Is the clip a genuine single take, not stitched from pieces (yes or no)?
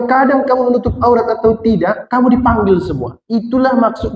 yes